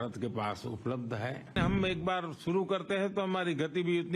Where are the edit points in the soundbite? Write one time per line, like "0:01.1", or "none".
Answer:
0:01.6